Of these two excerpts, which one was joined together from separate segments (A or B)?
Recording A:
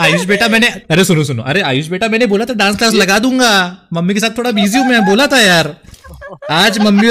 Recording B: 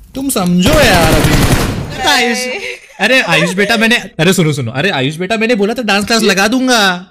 B